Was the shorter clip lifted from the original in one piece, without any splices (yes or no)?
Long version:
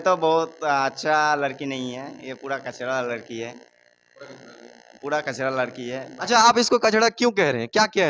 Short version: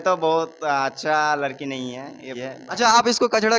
no